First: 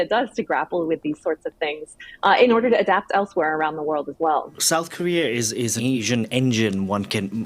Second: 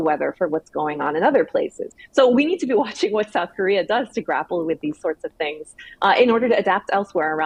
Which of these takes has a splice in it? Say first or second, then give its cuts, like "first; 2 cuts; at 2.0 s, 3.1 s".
first; 2 cuts; at 4.6 s, 5.8 s